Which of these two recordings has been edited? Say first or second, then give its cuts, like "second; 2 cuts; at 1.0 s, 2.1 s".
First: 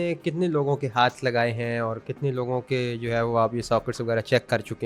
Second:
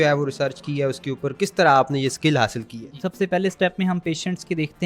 second; 1 cut; at 3.0 s